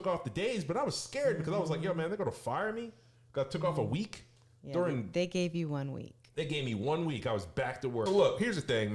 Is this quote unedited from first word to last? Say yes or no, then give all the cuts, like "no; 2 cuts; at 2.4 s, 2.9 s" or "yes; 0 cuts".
no; 1 cut; at 8.1 s